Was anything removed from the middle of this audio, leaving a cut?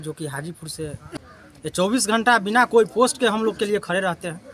no; 0 cuts

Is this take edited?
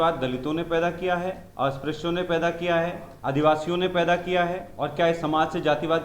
yes; 3 cuts; at 1.4 s, 3.1 s, 4.7 s

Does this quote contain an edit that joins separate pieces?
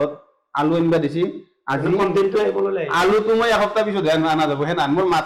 no; 0 cuts

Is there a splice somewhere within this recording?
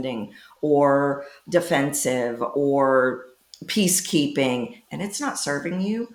no; 0 cuts

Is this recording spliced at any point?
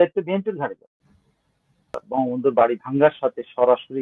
yes; 1 cut; at 2.1 s

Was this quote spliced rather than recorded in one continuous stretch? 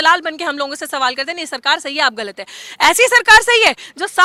no; 0 cuts

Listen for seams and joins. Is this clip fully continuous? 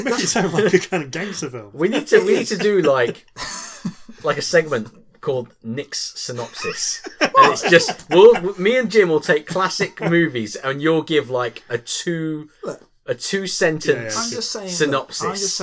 no; 1 cut; at 7.0 s

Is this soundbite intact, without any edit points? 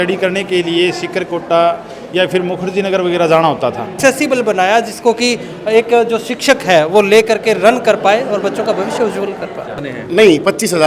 no; 2 cuts; at 4.0 s, 9.8 s

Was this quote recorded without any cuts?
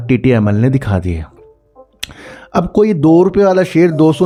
yes; 0 cuts

